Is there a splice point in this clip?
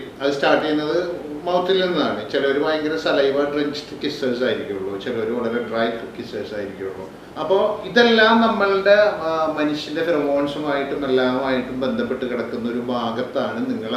no; 0 cuts

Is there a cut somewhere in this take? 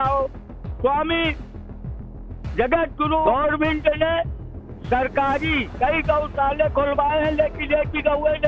yes; 1 cut; at 3.3 s

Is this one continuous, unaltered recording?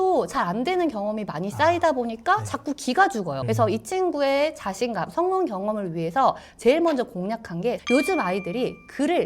no; 2 cuts; at 3.4 s, 7.8 s

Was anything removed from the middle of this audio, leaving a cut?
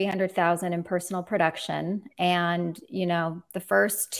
no; 0 cuts

